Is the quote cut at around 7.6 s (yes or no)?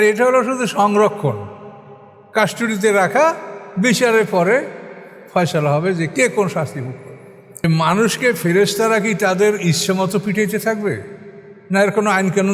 yes